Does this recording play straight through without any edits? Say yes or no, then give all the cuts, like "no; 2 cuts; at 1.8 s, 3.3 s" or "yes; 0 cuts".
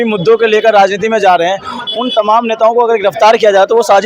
yes; 0 cuts